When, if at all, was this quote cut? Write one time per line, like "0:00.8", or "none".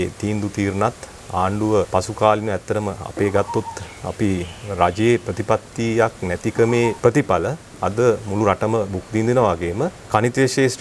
0:01.9
0:07.0
0:10.0